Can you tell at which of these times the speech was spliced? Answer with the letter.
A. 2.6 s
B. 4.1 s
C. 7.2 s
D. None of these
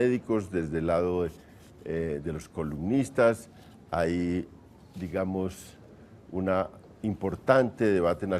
C